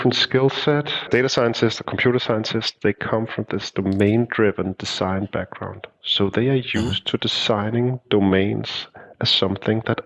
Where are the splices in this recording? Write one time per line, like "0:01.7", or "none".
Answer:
0:01.1